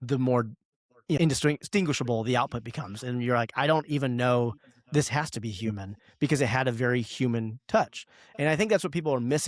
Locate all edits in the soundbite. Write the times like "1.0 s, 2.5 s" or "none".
1.2 s